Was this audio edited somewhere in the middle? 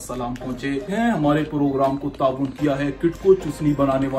yes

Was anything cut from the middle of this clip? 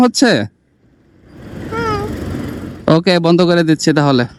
no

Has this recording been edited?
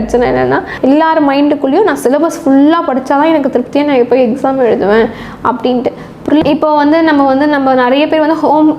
yes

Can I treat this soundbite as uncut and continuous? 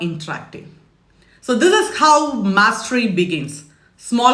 yes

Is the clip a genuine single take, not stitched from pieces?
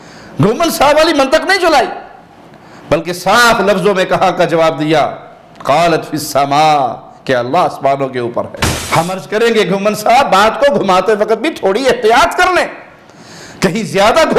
no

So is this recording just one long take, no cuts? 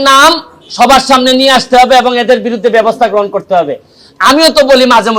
yes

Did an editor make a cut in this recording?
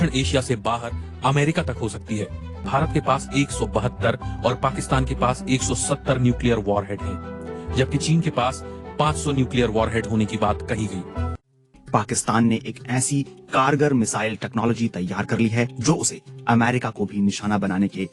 yes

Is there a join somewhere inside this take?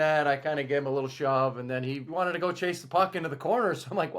yes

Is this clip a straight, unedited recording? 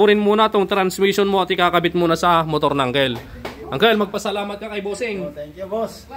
yes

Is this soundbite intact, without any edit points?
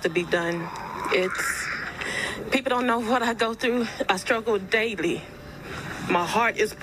yes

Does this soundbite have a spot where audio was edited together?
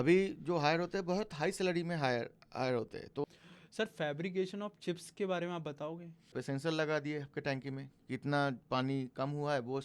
yes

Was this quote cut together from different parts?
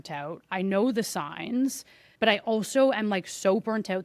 no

